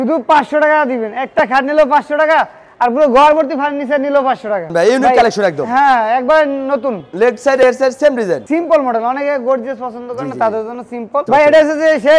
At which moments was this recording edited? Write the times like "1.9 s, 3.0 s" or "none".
4.7 s, 8.5 s, 11.2 s